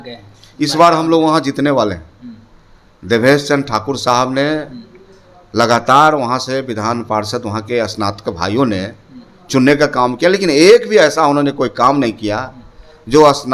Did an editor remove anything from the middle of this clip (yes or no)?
no